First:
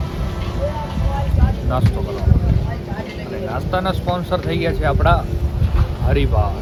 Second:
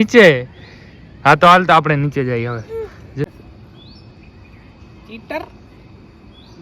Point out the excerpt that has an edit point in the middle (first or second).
second